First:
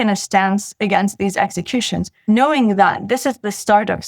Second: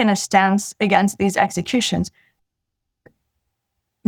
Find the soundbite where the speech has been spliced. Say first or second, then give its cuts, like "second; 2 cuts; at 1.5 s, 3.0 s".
first; 1 cut; at 2.1 s